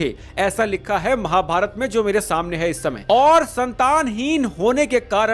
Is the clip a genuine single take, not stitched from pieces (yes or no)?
yes